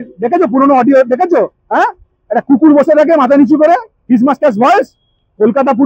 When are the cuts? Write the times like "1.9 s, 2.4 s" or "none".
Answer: none